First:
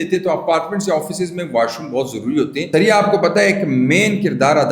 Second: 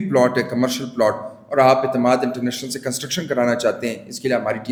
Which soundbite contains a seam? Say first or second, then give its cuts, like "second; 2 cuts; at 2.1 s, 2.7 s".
first; 1 cut; at 2.6 s